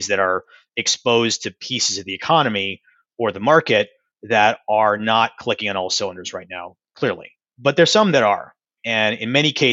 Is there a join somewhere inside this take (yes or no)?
yes